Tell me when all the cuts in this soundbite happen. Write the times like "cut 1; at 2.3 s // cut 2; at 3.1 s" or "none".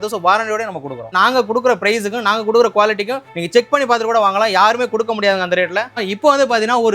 cut 1; at 1.1 s // cut 2; at 6.0 s